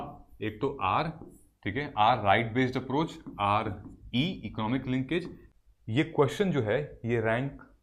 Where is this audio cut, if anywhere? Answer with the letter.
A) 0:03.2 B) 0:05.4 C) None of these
B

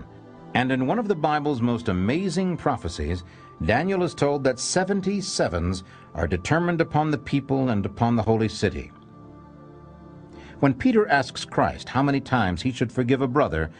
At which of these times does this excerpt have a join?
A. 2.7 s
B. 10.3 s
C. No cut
A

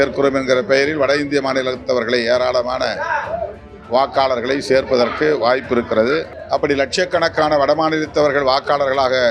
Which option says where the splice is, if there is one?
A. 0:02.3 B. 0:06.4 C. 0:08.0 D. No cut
B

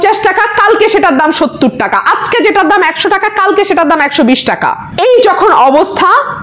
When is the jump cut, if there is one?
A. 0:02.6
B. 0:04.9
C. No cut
B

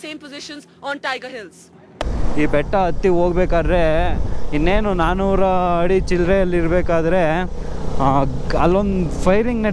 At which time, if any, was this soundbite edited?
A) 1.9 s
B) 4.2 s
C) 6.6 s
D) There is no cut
A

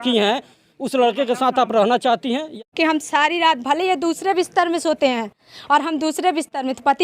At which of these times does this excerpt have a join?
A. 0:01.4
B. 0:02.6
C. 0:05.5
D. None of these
B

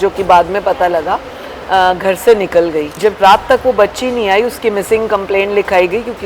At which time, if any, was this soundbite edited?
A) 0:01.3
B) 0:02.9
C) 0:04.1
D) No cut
B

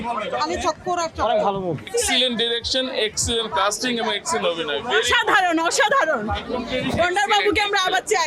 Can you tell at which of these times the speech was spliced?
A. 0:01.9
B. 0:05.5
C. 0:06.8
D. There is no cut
A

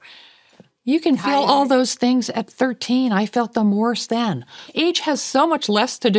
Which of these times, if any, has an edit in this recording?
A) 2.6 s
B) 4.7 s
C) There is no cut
B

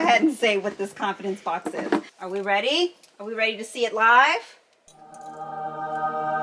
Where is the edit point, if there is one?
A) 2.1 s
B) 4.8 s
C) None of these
A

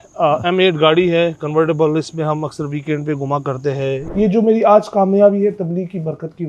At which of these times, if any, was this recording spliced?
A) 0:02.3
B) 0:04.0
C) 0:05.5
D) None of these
B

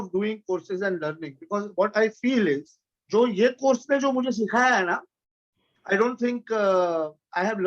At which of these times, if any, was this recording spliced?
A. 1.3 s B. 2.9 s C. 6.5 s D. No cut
B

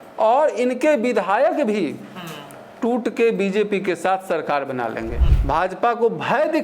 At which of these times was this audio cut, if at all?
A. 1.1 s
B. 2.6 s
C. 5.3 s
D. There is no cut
C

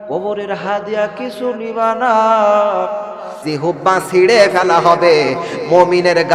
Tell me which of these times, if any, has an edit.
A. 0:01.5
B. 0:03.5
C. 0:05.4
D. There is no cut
B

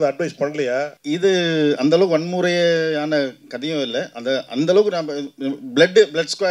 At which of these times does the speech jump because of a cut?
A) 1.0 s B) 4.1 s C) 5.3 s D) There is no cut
A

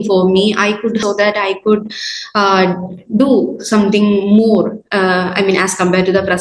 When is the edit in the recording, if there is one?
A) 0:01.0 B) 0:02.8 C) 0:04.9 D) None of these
A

